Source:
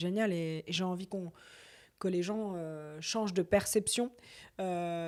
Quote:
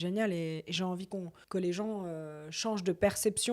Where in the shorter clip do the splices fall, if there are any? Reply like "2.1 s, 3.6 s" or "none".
1.4 s